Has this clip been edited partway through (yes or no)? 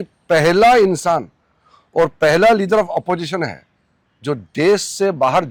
no